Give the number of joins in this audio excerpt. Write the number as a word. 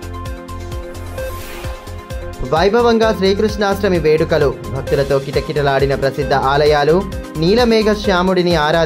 zero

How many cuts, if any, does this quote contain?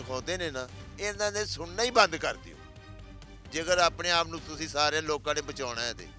zero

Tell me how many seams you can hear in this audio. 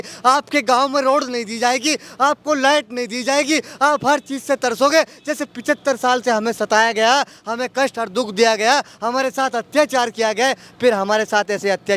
zero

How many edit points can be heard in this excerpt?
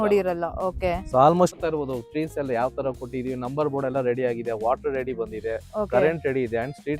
one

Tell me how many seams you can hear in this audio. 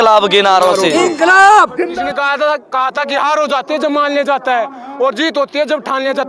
one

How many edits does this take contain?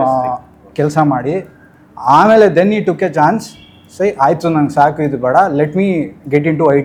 zero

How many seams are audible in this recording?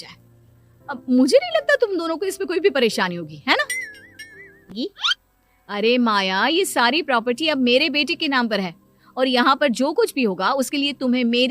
one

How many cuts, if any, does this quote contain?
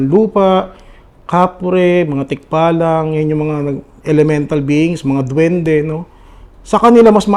zero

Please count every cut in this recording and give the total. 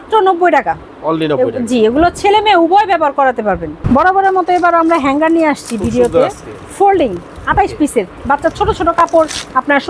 one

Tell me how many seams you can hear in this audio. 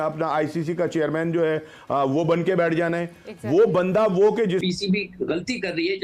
one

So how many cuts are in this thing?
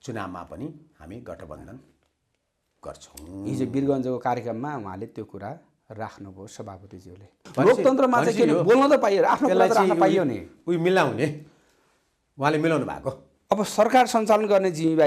one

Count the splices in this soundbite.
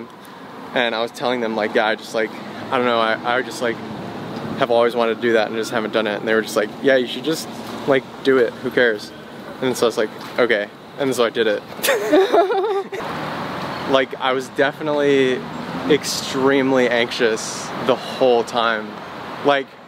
one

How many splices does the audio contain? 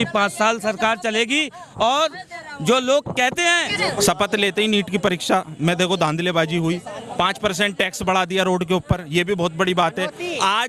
one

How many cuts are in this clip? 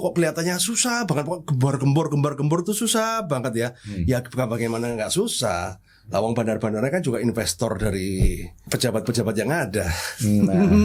one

